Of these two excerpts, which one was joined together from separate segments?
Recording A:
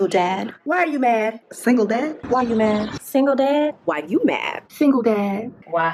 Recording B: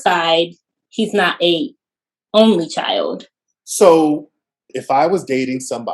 B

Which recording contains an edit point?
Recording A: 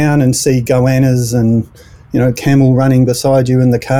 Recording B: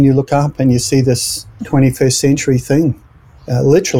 B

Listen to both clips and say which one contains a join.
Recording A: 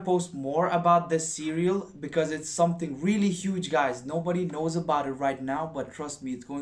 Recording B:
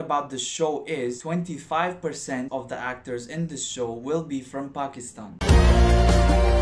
B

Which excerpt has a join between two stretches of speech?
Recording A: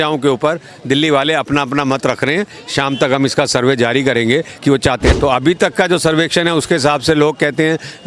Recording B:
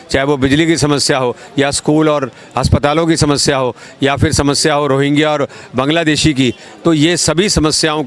A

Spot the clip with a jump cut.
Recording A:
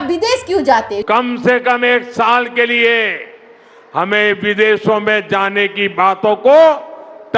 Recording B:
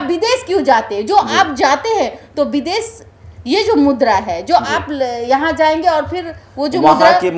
A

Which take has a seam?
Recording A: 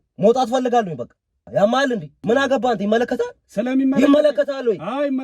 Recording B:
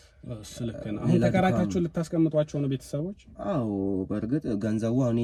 A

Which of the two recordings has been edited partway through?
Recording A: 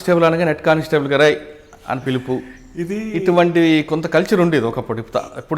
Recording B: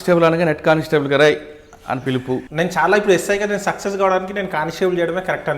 B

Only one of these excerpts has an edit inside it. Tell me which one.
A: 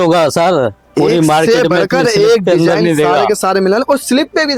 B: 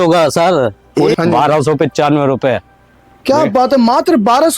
B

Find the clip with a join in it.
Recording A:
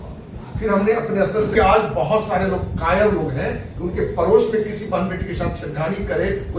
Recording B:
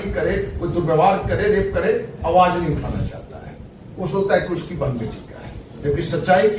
A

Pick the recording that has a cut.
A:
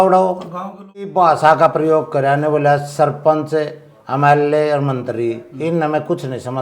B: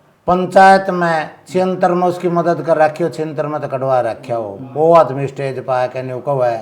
A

